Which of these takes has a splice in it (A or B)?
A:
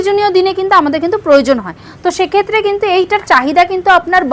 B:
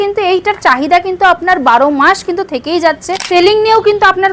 B